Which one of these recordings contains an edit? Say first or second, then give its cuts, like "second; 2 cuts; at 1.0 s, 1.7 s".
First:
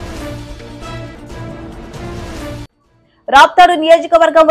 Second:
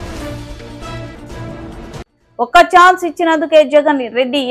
first; 1 cut; at 2.0 s